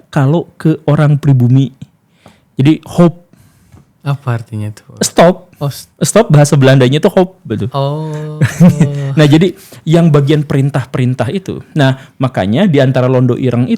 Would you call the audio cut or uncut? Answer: uncut